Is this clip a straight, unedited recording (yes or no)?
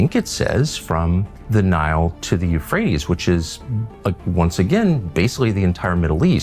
no